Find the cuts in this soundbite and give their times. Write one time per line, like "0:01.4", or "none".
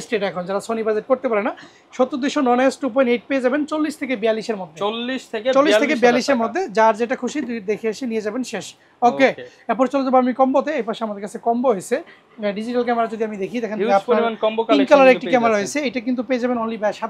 none